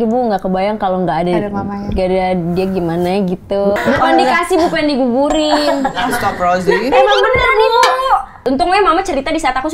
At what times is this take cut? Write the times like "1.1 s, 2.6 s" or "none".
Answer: 3.8 s, 8.4 s